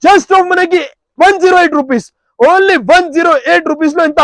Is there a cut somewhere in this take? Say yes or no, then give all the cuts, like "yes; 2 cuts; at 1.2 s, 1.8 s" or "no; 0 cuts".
no; 0 cuts